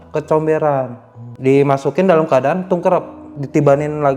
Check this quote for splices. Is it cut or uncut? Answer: uncut